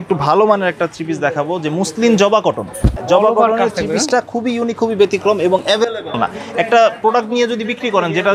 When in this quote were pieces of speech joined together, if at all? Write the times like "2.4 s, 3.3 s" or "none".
none